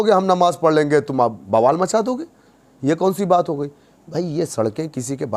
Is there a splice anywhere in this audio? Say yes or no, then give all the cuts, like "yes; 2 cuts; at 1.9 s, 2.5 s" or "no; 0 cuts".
no; 0 cuts